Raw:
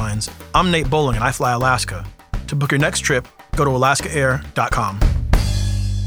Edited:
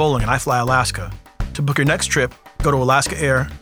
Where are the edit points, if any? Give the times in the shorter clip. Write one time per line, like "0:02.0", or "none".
none

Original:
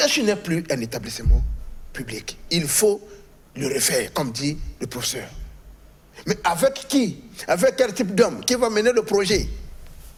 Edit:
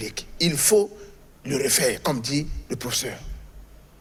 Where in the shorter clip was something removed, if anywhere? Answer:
none

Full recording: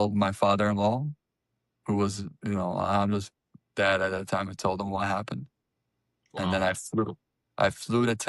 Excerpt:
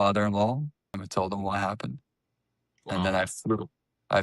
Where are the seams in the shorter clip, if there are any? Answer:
0:01.0

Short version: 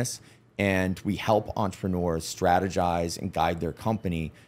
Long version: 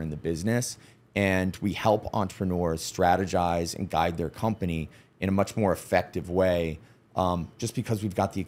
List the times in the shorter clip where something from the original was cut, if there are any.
none

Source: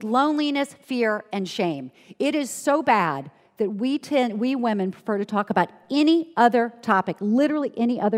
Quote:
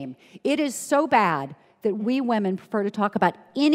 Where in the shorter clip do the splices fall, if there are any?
0:02.0

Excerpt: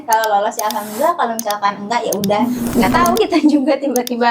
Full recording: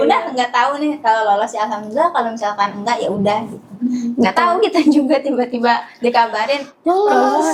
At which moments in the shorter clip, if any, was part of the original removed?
0:02.4

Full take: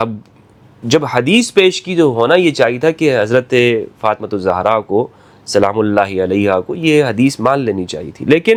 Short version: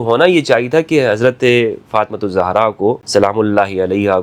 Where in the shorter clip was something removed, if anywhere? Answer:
0:03.0

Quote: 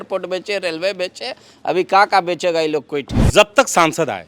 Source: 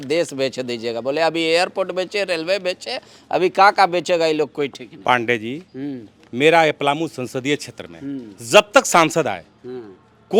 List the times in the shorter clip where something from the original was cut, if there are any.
0:03.2

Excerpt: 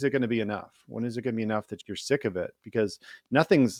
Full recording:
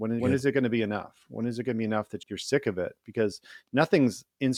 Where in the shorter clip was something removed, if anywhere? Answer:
none

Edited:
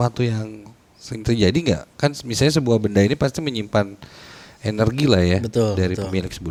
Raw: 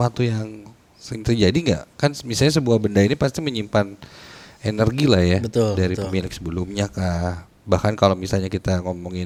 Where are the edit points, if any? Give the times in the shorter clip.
none

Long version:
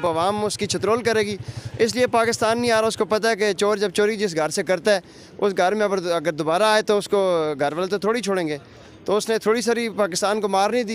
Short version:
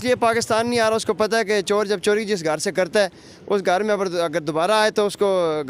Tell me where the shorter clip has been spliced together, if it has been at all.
none

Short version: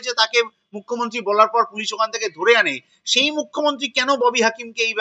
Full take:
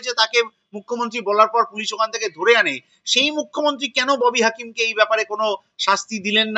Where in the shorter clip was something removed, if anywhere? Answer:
none

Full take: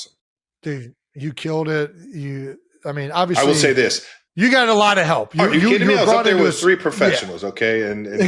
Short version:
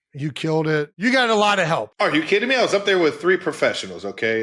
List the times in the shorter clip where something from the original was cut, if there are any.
0:00.9

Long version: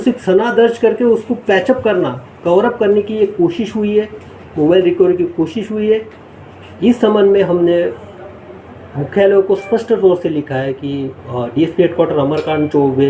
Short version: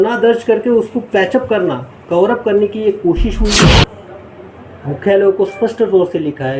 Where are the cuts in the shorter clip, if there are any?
0:03.8

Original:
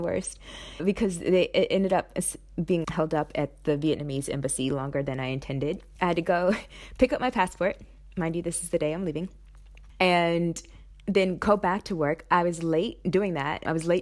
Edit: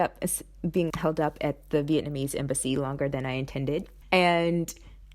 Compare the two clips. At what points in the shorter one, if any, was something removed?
0:03.9

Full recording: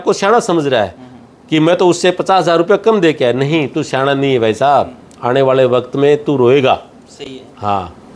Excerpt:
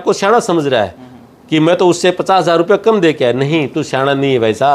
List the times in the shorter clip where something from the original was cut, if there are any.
none

